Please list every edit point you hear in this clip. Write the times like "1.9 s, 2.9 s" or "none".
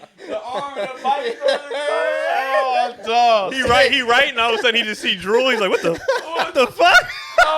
3.5 s